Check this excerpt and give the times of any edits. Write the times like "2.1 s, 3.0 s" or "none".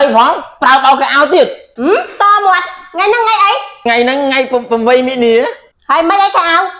1.7 s, 3.9 s, 5.7 s